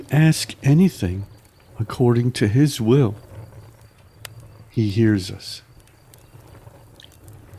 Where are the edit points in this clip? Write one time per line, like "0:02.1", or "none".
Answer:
0:03.2
0:04.7
0:05.5